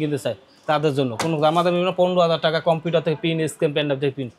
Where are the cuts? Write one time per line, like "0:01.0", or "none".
none